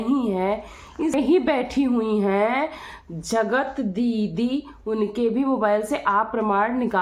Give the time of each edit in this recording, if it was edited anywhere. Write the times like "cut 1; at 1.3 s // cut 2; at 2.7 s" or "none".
cut 1; at 1.1 s